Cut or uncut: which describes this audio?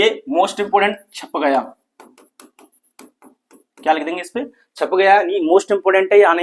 uncut